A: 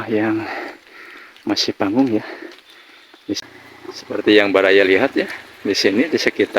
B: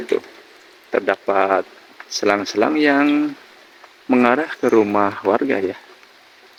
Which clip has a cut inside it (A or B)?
A